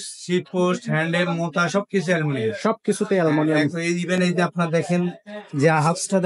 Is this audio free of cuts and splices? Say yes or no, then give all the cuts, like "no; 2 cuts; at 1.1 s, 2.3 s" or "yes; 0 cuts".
yes; 0 cuts